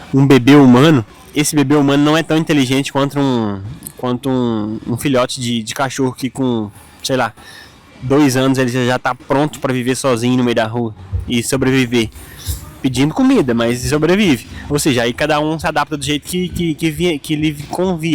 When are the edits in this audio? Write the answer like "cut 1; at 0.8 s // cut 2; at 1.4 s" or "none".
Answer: cut 1; at 1.2 s